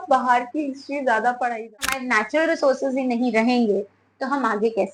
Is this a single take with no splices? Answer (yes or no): no